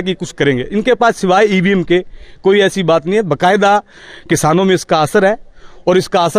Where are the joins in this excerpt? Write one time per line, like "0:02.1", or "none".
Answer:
none